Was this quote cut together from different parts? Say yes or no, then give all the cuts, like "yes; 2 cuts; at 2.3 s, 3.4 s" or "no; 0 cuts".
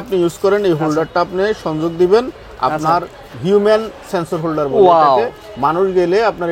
no; 0 cuts